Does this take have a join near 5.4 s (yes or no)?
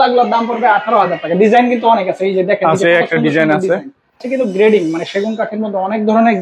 no